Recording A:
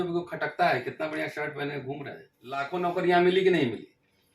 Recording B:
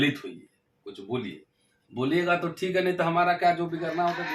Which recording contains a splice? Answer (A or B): A